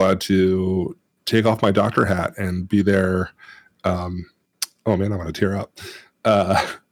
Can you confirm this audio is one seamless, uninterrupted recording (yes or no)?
yes